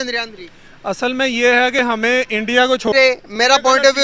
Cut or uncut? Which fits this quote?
cut